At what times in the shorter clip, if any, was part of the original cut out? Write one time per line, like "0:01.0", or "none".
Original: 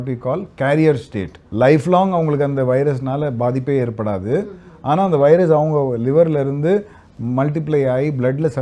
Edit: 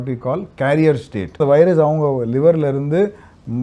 0:01.4